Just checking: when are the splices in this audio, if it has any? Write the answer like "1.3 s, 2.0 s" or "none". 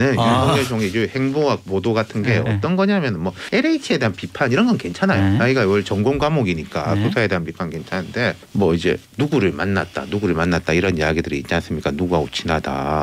3.4 s, 8.4 s